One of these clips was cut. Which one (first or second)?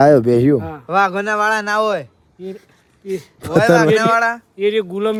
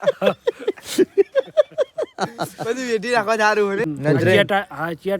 second